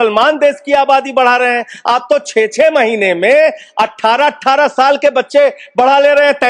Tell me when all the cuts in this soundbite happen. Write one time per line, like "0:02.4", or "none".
none